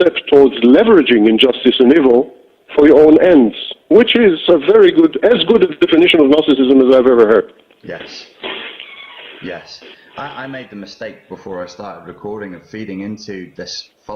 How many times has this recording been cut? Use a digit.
1